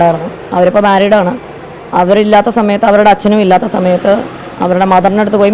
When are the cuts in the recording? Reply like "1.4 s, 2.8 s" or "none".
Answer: none